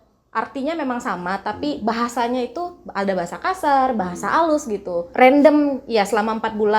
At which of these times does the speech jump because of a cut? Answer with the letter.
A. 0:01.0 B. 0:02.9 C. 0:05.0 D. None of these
C